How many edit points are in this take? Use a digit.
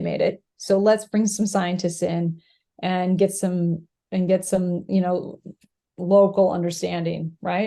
0